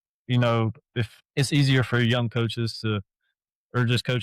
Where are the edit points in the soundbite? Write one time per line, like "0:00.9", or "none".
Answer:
0:01.2